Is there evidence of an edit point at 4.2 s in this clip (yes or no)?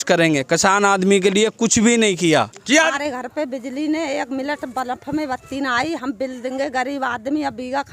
no